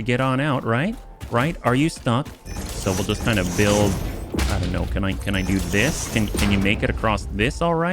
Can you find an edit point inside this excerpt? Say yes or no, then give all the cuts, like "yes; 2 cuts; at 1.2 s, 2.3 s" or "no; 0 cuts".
yes; 1 cut; at 2.4 s